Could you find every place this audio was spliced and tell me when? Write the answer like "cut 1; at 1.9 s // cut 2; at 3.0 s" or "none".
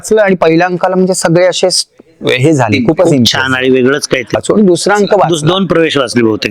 cut 1; at 4.4 s